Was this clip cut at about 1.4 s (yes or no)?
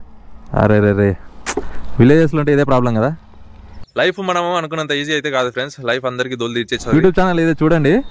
no